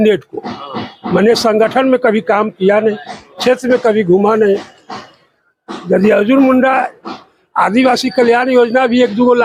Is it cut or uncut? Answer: uncut